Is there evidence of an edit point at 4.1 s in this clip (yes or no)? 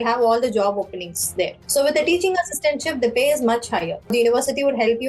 yes